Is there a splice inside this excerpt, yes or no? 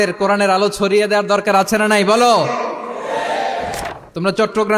yes